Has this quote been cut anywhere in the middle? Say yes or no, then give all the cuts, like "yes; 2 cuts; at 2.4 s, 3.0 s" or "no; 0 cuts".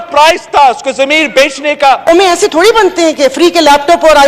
yes; 1 cut; at 2.1 s